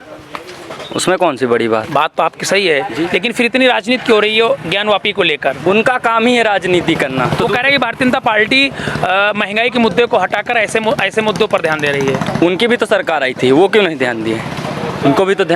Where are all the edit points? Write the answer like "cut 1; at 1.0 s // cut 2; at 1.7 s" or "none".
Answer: none